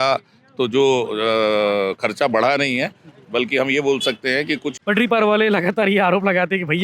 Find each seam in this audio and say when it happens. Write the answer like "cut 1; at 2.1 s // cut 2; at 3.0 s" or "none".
cut 1; at 4.7 s